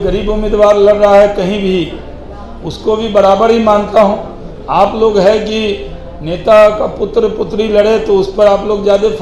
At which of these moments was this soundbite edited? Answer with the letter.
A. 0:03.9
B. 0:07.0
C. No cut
C